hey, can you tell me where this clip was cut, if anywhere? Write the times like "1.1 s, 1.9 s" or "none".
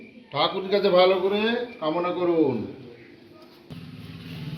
3.7 s